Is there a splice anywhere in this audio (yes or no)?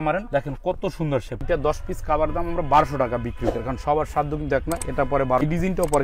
yes